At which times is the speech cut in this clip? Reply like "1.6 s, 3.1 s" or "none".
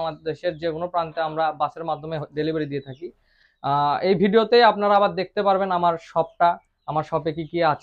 none